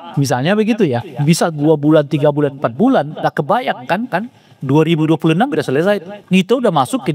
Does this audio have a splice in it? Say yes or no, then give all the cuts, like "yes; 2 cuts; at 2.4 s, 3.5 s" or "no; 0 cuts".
yes; 1 cut; at 6.1 s